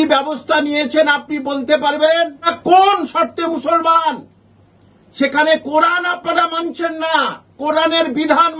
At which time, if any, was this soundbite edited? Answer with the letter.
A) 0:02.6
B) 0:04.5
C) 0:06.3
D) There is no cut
A